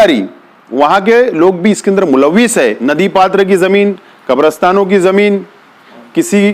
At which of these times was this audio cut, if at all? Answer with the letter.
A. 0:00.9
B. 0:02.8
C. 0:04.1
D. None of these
B